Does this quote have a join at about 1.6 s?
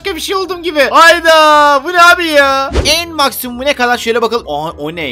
no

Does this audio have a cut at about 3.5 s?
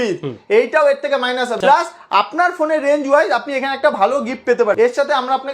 no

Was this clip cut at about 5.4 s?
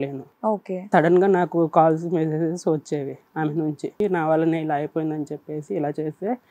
no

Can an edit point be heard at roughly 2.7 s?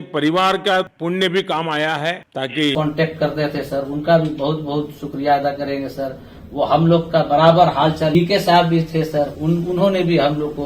yes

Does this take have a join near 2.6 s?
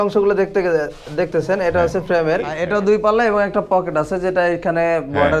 yes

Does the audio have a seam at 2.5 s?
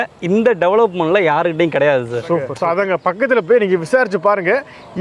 yes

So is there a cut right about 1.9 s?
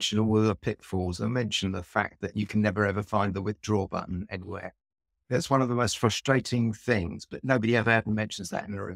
no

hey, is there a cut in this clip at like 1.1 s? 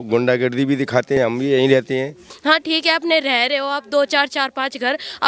yes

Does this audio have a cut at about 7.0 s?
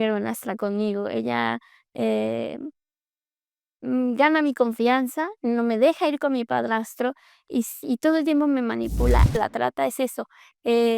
no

